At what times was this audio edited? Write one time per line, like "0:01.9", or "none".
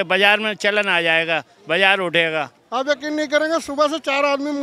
0:02.6